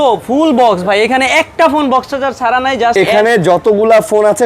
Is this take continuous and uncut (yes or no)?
no